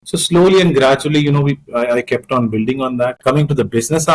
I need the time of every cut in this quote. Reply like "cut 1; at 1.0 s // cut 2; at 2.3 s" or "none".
cut 1; at 3.2 s